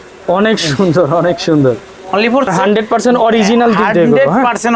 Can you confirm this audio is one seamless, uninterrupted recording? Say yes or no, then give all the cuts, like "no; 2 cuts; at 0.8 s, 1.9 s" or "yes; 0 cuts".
no; 1 cut; at 2.5 s